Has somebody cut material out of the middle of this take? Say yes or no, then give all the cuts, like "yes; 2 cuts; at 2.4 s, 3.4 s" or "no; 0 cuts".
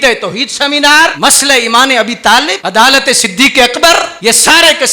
yes; 2 cuts; at 1.1 s, 4.1 s